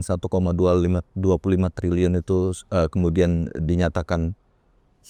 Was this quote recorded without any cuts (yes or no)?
yes